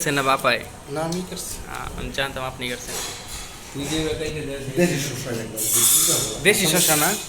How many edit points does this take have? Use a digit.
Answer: 0